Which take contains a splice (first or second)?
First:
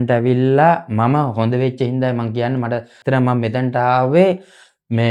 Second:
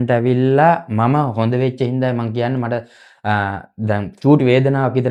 first